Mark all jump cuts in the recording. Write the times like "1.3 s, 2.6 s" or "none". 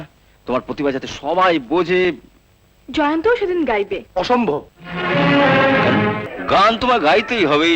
6.3 s